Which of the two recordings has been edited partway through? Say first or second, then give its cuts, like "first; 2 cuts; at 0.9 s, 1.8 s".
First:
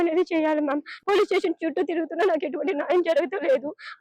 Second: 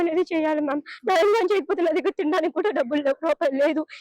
first; 1 cut; at 0.9 s